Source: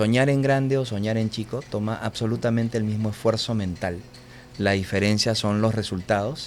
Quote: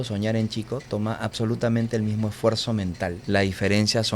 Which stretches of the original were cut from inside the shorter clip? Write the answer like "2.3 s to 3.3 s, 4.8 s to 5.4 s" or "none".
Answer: 4.0 s to 4.5 s